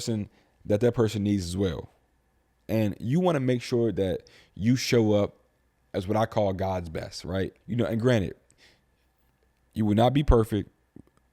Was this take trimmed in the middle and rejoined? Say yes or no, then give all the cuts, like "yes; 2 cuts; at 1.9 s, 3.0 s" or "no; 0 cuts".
yes; 2 cuts; at 2.5 s, 7.6 s